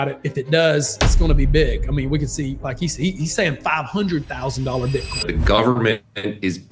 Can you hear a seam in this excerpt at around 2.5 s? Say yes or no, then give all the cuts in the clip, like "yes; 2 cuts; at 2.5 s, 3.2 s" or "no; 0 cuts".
no; 1 cut; at 5.3 s